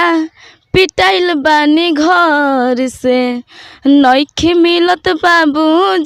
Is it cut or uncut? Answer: uncut